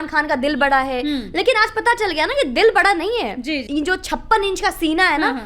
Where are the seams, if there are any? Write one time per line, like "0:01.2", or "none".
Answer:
0:03.6